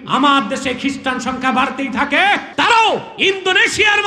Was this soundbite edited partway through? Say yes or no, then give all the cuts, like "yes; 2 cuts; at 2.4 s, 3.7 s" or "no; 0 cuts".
yes; 1 cut; at 2.5 s